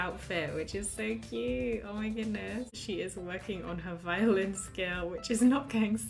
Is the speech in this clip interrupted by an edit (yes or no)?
yes